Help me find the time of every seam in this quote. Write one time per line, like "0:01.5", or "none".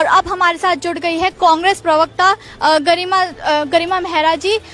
none